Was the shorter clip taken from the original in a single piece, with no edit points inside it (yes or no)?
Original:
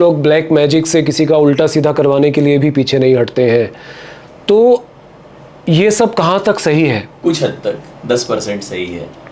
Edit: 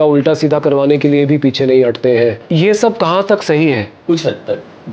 no